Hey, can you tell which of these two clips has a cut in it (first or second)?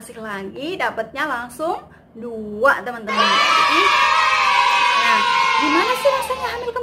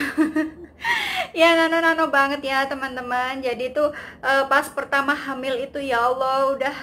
first